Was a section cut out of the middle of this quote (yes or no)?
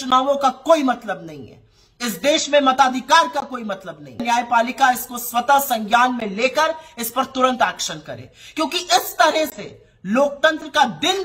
yes